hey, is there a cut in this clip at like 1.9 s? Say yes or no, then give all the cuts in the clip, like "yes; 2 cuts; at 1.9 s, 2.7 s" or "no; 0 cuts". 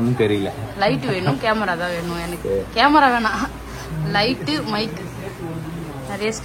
no; 0 cuts